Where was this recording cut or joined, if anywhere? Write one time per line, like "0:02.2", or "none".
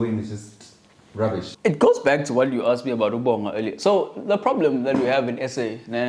0:01.5

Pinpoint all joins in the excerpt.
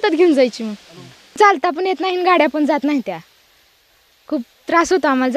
0:01.4

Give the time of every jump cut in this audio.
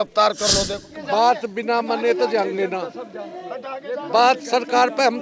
0:01.0

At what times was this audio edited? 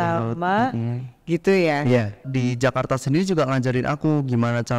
0:02.2

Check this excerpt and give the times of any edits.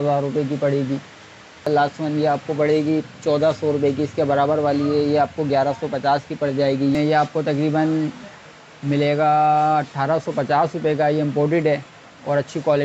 0:01.7
0:06.9

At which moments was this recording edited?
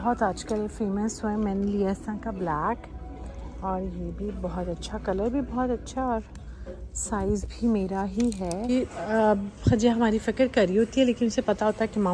0:08.7

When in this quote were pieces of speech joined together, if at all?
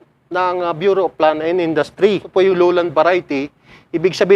0:02.3

